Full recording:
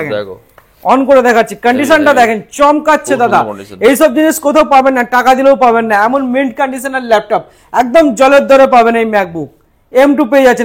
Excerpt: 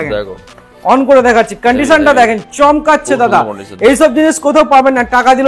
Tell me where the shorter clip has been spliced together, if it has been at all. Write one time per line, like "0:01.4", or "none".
none